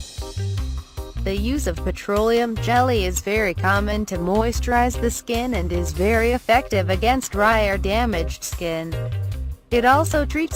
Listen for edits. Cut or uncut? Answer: uncut